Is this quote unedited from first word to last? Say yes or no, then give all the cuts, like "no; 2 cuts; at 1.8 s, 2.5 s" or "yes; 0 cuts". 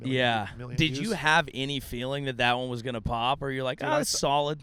yes; 0 cuts